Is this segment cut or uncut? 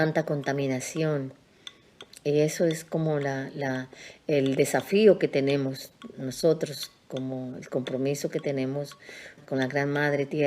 cut